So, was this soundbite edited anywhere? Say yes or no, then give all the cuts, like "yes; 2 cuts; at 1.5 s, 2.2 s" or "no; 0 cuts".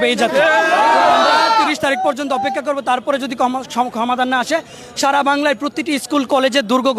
no; 0 cuts